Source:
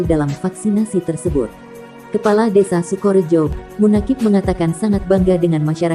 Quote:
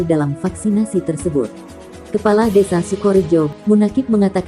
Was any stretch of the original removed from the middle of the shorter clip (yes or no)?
yes